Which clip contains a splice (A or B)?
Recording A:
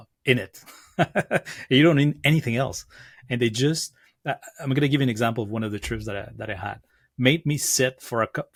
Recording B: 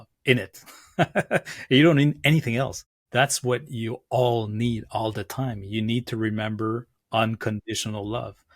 B